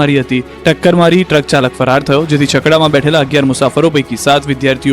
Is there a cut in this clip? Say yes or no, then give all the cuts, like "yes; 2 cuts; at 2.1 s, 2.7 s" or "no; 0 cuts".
yes; 1 cut; at 2.4 s